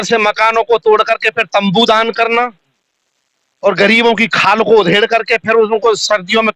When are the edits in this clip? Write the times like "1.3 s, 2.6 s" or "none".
none